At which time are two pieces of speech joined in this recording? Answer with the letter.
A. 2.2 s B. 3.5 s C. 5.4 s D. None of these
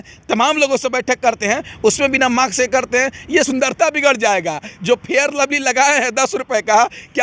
B